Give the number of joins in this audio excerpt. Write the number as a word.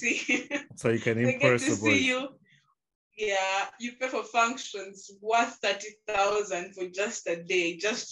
zero